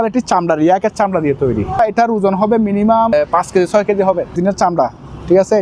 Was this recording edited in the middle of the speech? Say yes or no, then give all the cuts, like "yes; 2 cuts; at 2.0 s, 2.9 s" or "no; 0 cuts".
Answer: yes; 3 cuts; at 1.8 s, 3.1 s, 4.4 s